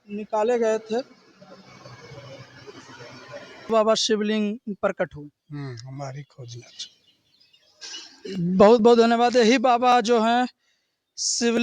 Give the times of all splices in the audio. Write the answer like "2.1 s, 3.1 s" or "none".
3.7 s